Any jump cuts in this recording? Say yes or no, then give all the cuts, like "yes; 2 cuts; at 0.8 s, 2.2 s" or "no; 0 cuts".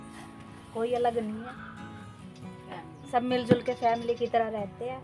yes; 2 cuts; at 1.5 s, 2.7 s